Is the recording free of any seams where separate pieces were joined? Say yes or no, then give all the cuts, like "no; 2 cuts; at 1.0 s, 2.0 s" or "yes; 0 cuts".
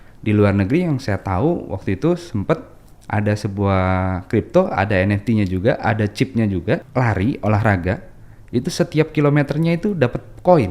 no; 1 cut; at 6.9 s